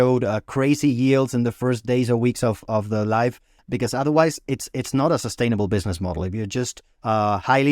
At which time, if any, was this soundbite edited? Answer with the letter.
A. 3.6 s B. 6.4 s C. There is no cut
A